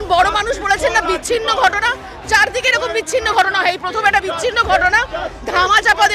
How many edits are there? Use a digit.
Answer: 0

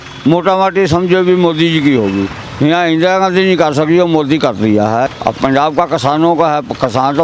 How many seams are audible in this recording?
2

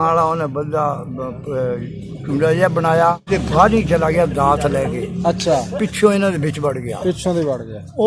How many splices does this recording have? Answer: 1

